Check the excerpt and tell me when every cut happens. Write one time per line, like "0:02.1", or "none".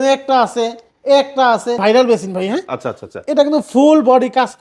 0:01.8